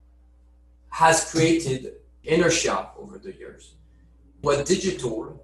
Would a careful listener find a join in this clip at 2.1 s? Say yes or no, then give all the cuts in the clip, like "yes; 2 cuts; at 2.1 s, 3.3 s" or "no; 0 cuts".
yes; 2 cuts; at 2.1 s, 4.4 s